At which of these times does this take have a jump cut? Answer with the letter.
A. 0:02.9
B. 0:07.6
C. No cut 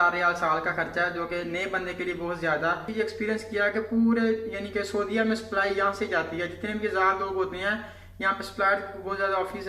A